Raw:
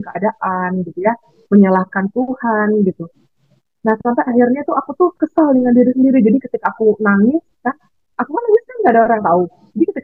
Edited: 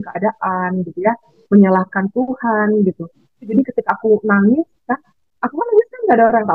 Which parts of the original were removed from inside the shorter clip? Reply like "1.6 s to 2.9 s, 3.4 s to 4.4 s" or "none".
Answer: 3.5 s to 6.3 s